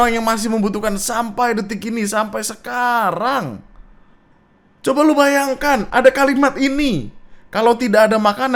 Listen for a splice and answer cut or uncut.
uncut